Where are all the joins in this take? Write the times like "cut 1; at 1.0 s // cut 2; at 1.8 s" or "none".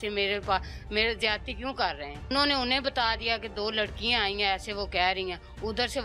cut 1; at 2.3 s